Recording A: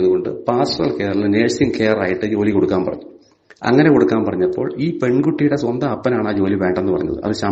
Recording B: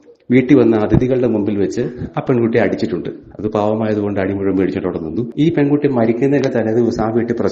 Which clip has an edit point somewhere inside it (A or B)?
B